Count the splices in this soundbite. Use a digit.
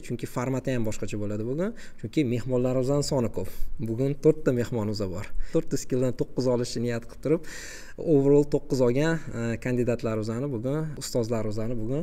2